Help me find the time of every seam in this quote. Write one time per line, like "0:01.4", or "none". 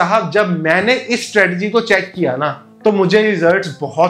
none